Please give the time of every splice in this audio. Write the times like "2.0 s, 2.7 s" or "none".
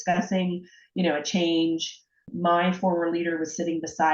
2.2 s